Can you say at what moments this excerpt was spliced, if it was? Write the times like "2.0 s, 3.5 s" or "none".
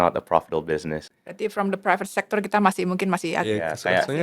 1.0 s